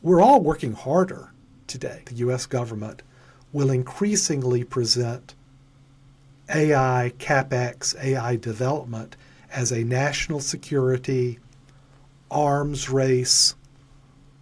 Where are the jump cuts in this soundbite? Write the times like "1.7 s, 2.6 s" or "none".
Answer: 2.1 s